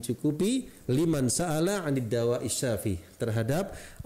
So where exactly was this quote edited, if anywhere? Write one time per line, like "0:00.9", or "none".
none

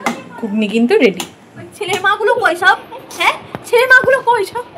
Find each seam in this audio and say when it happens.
0:01.8

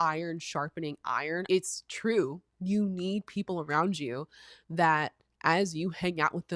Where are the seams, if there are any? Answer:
0:01.4

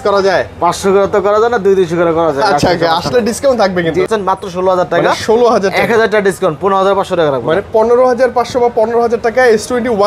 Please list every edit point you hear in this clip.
0:04.1

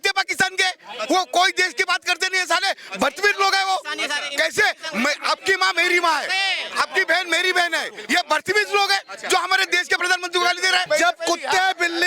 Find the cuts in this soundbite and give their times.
0:10.8

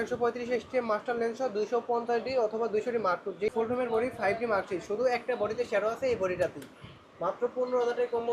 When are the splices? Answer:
0:03.5

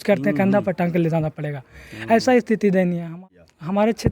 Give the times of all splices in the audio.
0:03.2

